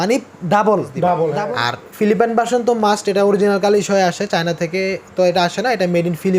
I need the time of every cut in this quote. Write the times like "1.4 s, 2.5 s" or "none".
1.4 s